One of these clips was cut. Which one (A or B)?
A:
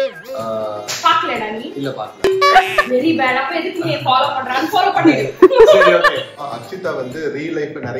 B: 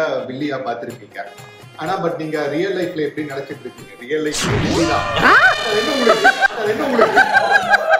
A